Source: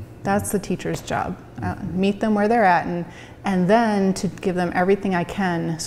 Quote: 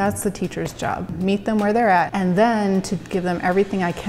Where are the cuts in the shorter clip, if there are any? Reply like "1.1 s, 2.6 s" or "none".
1.1 s, 2.1 s